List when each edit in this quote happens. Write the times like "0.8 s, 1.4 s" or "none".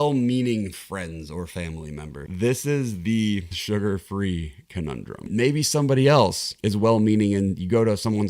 2.2 s, 5.3 s